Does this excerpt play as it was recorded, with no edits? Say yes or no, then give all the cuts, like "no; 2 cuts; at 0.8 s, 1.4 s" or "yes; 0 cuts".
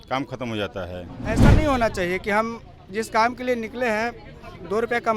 no; 1 cut; at 1.4 s